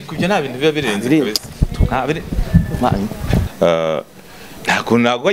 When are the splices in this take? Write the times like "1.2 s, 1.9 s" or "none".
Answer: 3.5 s